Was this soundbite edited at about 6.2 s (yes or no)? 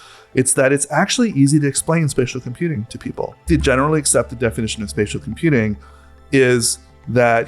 yes